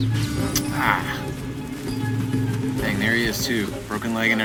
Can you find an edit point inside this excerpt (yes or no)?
no